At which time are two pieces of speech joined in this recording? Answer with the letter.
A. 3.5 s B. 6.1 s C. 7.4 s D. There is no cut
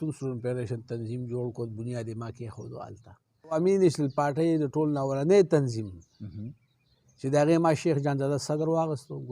A